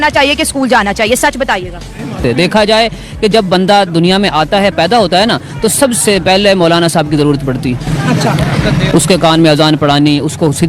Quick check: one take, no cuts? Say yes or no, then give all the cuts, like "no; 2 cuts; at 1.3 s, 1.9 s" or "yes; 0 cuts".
yes; 0 cuts